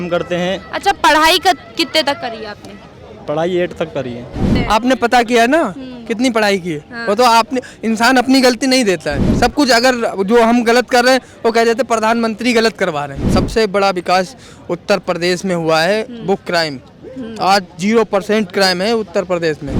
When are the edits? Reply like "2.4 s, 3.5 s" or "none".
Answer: 4.5 s, 13.2 s

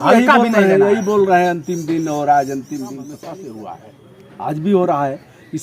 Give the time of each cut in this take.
3.3 s

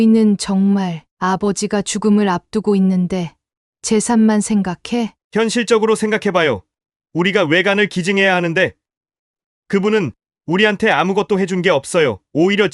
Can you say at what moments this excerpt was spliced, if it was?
none

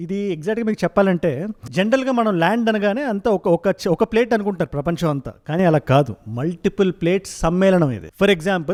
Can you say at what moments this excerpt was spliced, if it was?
none

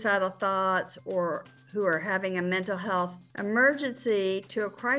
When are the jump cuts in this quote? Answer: none

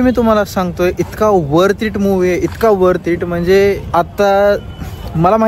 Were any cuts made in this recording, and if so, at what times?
none

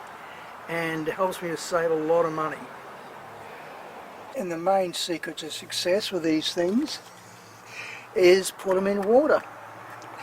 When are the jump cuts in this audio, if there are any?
4.3 s

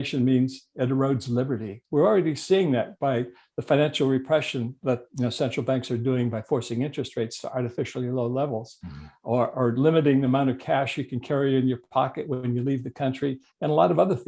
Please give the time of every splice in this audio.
none

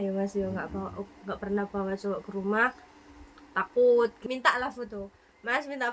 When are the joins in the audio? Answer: 4.2 s

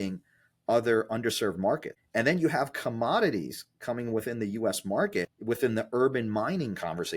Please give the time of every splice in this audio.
2.0 s, 5.3 s

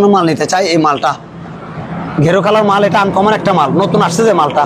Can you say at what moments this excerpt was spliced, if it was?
none

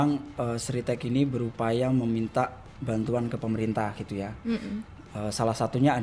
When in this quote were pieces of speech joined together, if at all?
none

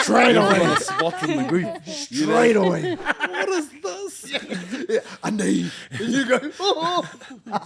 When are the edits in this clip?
3.1 s

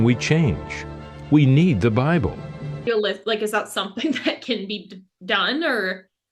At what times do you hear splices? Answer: 2.7 s

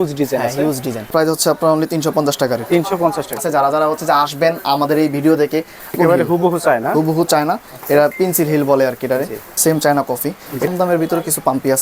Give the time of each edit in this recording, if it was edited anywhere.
1.1 s, 3.4 s, 6.0 s, 9.4 s, 10.7 s

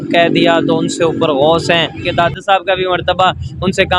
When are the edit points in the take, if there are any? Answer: 2.1 s

